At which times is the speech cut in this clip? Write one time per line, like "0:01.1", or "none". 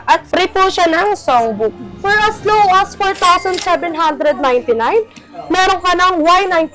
0:01.9